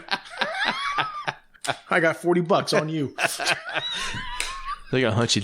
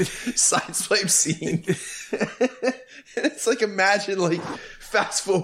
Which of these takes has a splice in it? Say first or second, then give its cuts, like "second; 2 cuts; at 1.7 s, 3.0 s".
first; 1 cut; at 1.5 s